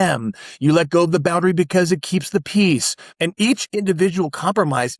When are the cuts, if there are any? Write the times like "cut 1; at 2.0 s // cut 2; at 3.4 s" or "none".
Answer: cut 1; at 3.1 s